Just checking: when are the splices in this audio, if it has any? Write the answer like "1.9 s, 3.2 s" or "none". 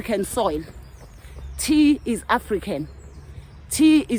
none